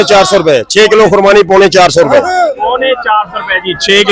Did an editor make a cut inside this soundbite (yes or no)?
no